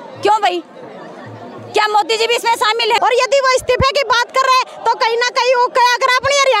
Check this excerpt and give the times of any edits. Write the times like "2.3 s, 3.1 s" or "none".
3.0 s